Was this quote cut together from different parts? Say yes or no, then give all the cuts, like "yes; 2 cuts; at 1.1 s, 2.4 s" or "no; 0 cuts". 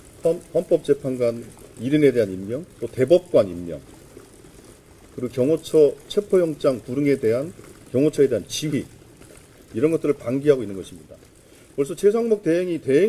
no; 0 cuts